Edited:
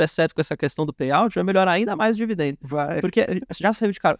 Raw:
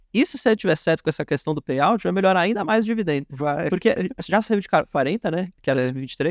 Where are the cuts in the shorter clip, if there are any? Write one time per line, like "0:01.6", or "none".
none